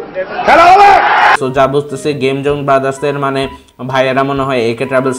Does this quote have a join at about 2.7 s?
no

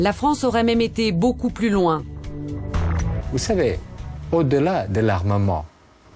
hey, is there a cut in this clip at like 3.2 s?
yes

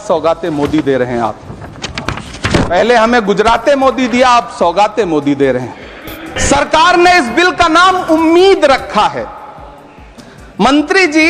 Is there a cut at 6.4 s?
yes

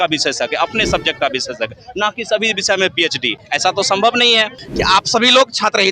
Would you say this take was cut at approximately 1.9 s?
no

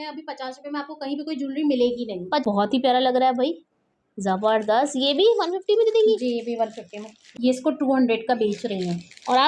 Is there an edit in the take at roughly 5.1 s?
no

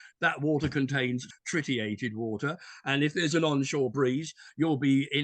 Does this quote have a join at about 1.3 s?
yes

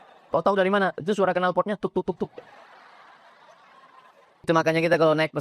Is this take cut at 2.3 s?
no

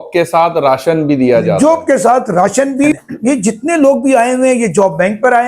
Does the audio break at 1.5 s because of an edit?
no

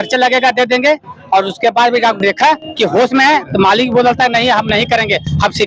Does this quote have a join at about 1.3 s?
no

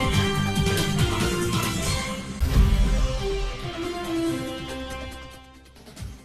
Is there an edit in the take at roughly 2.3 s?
yes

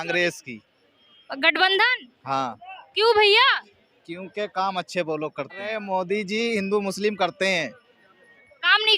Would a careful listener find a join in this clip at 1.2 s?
no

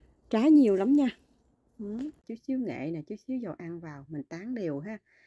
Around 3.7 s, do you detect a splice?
no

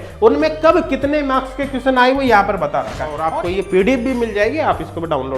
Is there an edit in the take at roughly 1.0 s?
no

